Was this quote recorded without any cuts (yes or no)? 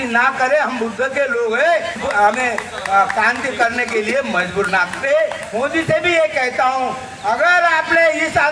no